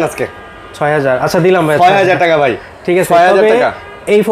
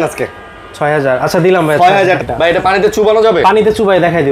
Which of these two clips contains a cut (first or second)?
second